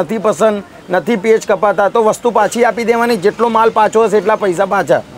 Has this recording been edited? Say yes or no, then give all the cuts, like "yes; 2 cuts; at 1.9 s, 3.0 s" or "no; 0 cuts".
no; 0 cuts